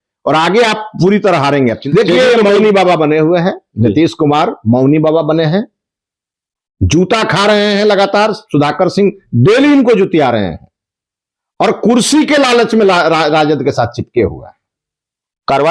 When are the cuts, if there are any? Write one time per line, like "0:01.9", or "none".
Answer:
0:01.8